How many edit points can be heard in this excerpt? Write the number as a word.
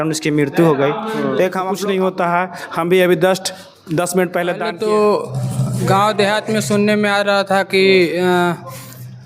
two